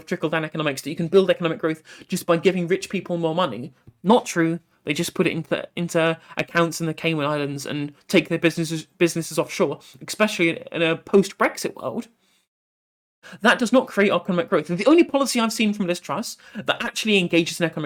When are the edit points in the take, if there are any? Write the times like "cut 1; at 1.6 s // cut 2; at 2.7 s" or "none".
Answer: none